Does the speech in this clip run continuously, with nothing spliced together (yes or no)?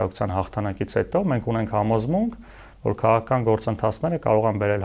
yes